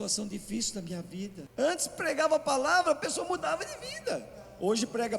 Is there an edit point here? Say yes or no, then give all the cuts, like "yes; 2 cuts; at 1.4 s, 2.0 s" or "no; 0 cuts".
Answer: yes; 1 cut; at 1.4 s